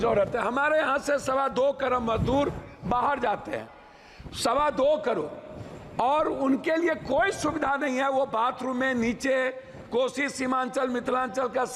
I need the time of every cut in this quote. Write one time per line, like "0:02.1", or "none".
none